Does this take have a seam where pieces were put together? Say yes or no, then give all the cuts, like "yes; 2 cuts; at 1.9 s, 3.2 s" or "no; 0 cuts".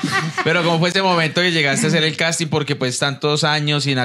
no; 0 cuts